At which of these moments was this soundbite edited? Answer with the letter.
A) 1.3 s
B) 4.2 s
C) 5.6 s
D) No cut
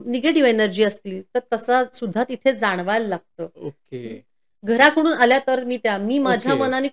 B